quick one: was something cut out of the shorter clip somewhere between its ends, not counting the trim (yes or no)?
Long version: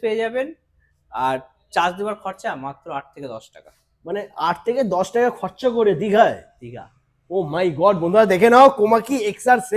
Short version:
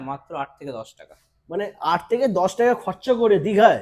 no